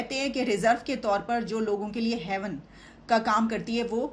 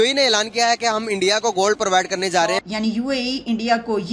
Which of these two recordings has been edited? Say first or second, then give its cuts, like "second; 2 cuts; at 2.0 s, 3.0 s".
second; 1 cut; at 2.6 s